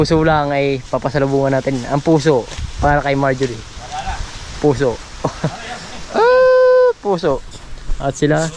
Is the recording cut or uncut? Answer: uncut